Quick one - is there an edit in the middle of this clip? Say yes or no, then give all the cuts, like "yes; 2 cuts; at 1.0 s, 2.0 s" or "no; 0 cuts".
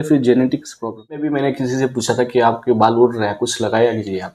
yes; 1 cut; at 1.3 s